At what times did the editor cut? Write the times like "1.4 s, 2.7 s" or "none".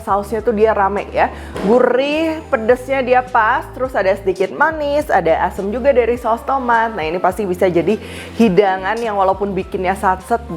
none

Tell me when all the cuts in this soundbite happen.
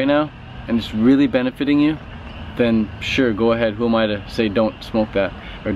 none

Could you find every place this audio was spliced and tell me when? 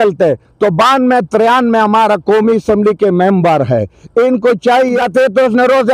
5.0 s

